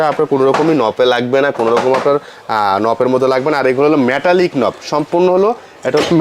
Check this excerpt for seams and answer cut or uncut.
uncut